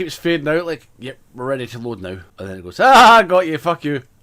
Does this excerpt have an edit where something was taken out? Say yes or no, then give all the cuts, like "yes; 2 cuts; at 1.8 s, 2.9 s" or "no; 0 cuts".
yes; 1 cut; at 2.3 s